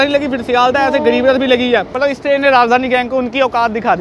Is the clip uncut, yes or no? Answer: no